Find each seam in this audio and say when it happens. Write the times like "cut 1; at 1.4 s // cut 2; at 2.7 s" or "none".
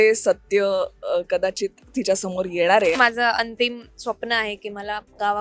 cut 1; at 3.0 s